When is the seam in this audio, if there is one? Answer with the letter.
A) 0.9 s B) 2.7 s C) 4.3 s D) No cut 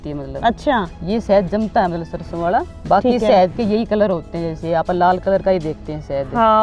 B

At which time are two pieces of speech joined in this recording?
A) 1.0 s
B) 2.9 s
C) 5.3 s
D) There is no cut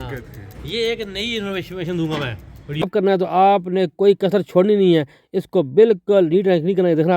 B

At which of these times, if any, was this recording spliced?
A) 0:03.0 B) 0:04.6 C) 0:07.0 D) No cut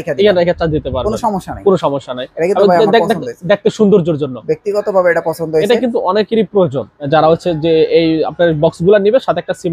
C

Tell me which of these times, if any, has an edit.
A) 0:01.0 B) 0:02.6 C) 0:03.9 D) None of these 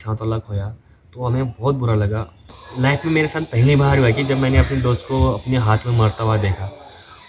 B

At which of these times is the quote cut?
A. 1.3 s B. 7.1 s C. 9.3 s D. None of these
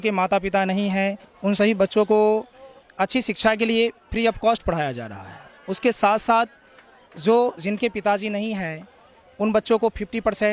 A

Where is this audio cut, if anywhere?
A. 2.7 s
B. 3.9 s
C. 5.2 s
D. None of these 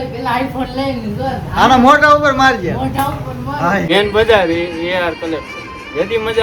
B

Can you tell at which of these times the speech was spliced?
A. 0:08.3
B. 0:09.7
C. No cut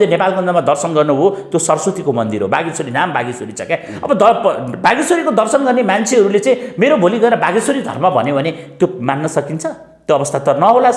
C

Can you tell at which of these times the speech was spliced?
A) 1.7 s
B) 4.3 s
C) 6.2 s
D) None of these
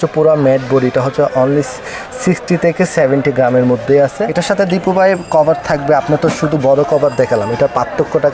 B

